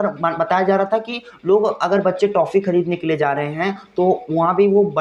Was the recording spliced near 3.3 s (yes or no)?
no